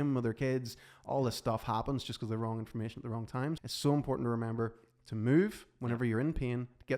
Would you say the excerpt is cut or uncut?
cut